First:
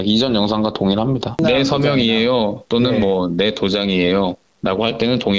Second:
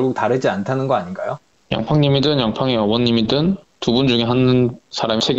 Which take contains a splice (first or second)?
first